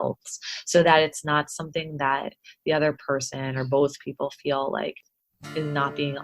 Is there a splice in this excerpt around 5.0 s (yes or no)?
yes